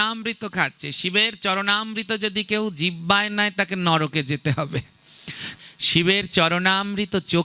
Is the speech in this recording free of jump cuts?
no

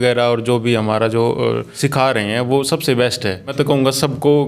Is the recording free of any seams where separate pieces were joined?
no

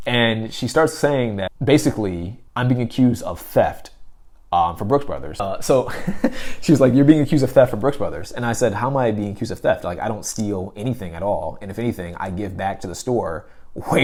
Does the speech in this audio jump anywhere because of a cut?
no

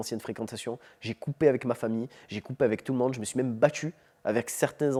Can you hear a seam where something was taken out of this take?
no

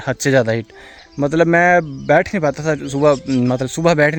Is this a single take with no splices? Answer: yes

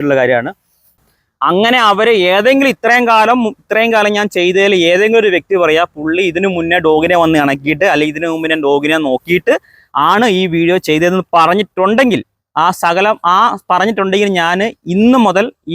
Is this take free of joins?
no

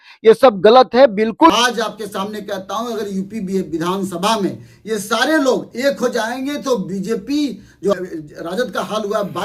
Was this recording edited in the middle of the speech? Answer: yes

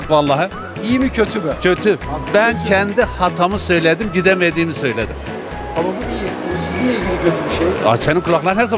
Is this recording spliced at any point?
no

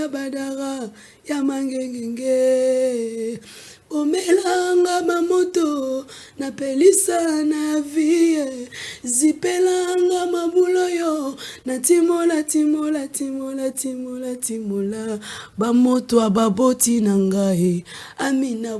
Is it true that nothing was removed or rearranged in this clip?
yes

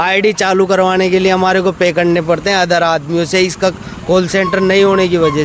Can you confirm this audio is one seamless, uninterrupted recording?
yes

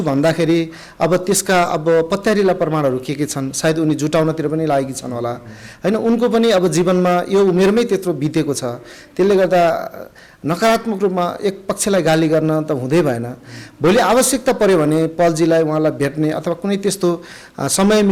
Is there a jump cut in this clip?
no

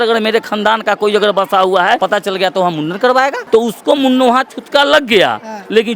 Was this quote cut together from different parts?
yes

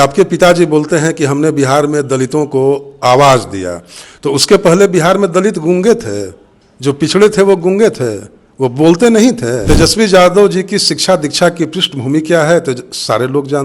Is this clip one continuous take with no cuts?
no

